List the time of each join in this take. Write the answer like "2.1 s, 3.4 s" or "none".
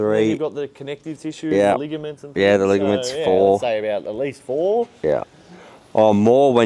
none